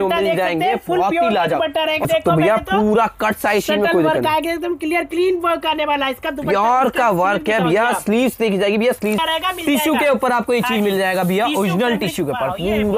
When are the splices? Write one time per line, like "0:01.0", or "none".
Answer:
0:02.1
0:09.2